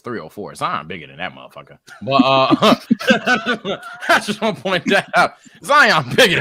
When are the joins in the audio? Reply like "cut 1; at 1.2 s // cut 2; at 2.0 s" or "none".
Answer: none

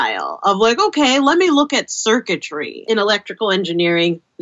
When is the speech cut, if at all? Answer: cut 1; at 2.8 s

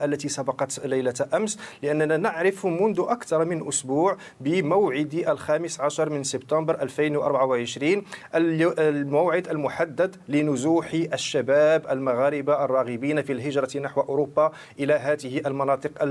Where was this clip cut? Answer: none

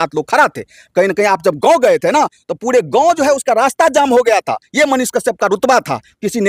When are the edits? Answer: none

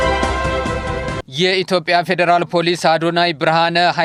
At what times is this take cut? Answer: cut 1; at 1.2 s

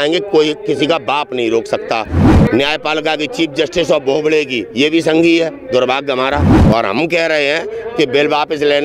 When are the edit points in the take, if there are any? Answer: cut 1; at 2.2 s // cut 2; at 6.5 s

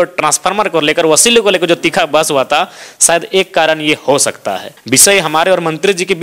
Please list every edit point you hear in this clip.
cut 1; at 4.7 s

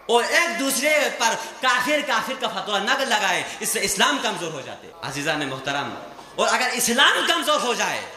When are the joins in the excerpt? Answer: cut 1; at 4.9 s

